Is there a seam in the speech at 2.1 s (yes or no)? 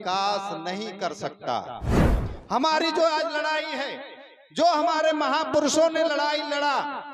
yes